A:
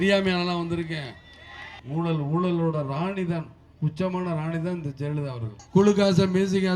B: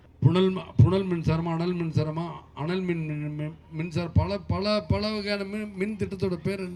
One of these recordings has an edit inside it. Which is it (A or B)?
A